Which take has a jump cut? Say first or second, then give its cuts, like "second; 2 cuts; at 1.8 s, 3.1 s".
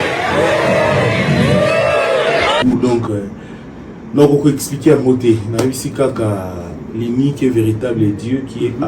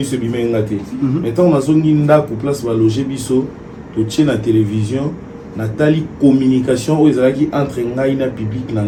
first; 1 cut; at 2.6 s